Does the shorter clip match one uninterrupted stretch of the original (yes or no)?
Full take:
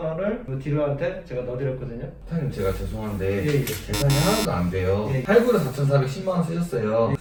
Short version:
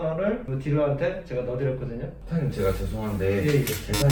yes